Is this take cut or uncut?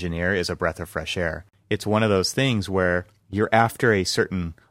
cut